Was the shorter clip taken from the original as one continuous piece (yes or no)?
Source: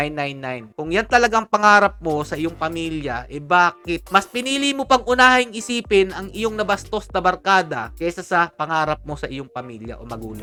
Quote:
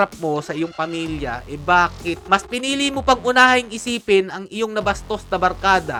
yes